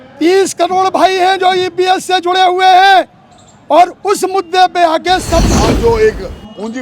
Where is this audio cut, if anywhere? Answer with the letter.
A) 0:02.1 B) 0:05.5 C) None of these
B